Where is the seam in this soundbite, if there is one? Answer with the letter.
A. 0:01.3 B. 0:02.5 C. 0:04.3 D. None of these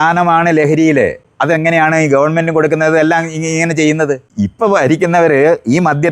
C